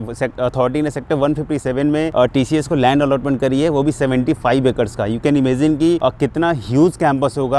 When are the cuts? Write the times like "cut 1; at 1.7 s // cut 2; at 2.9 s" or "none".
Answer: cut 1; at 2.1 s // cut 2; at 6.0 s